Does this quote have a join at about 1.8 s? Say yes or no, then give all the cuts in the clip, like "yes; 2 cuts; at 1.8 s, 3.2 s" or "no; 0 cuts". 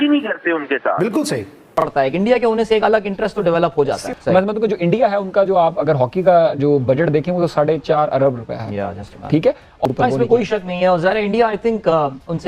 yes; 2 cuts; at 1.8 s, 9.9 s